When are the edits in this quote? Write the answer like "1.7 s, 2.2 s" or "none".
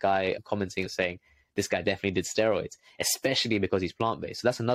0.9 s